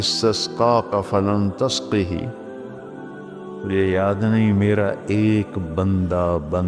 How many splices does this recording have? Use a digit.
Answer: 2